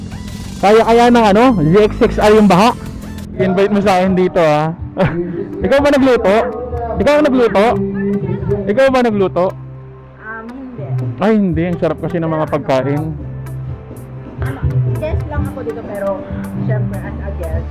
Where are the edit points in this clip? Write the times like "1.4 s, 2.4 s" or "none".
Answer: 3.4 s

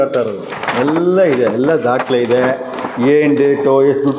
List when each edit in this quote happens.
none

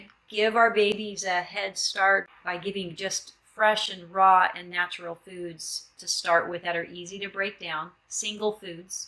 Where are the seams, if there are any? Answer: 2.3 s

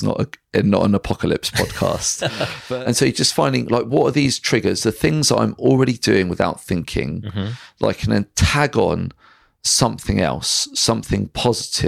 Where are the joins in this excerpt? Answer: 2.6 s

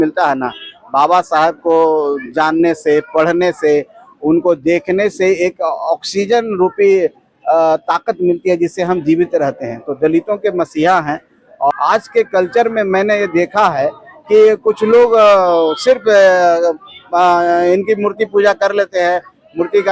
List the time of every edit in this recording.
11.7 s

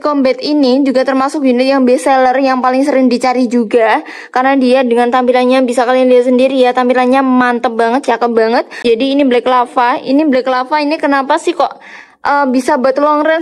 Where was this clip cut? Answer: 8.8 s

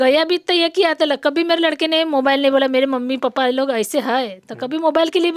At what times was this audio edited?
none

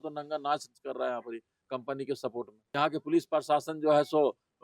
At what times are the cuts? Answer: 2.6 s

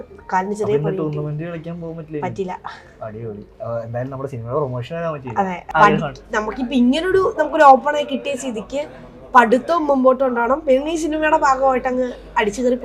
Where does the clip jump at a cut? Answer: 5.6 s

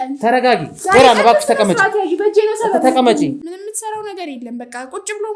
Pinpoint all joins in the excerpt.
3.5 s

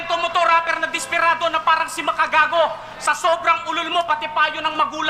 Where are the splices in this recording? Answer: none

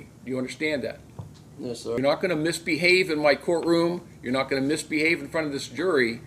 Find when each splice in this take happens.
2.0 s

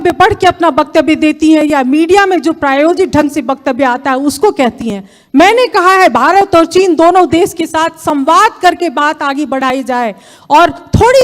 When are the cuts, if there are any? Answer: none

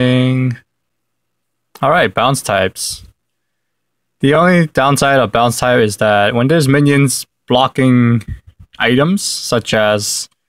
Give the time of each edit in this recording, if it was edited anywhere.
9.6 s

